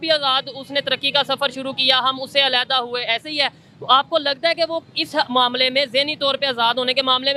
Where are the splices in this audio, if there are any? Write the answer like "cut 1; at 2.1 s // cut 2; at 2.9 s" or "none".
none